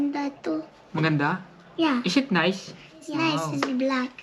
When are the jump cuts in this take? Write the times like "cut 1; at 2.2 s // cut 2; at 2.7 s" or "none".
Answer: cut 1; at 3.1 s